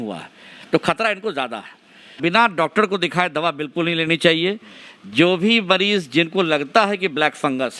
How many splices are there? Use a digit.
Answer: 1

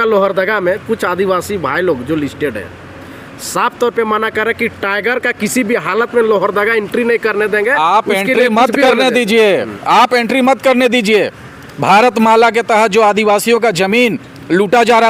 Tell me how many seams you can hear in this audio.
0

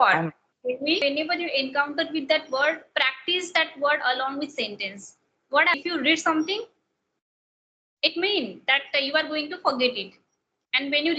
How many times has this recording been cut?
2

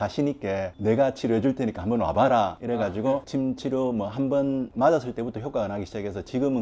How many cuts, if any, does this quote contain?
1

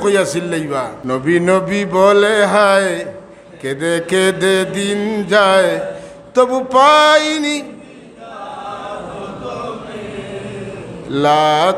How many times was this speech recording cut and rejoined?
1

